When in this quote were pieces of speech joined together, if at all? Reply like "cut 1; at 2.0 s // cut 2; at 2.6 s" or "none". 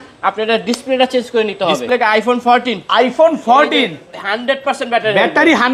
cut 1; at 1.9 s